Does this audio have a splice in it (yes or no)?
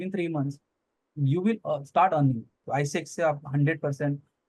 yes